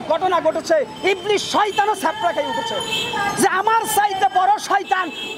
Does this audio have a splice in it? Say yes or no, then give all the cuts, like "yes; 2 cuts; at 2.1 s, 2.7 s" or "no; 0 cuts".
no; 0 cuts